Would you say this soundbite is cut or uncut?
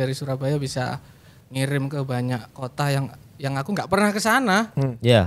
uncut